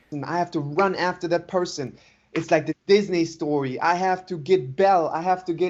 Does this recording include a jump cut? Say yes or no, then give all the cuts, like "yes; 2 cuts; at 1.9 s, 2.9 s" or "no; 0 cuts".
no; 0 cuts